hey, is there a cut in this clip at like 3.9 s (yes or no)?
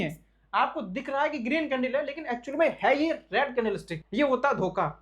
yes